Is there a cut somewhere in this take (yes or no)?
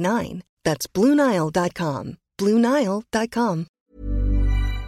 yes